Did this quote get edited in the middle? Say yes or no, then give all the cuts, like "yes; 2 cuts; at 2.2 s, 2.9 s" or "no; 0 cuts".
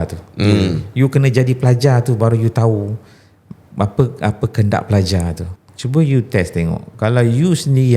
yes; 1 cut; at 5.5 s